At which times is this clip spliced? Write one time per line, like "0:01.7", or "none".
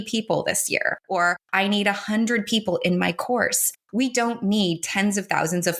none